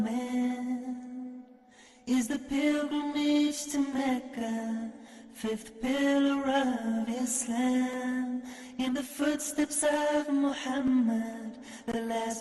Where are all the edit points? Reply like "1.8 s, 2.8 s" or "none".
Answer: none